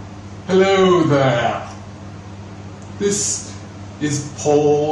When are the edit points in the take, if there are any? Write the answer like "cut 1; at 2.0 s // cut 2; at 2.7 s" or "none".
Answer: cut 1; at 1.4 s